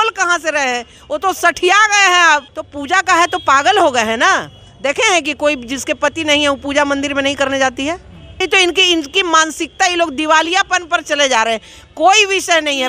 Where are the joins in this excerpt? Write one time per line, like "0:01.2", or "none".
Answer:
0:02.6
0:08.4